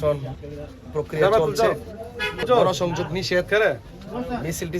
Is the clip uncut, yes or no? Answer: no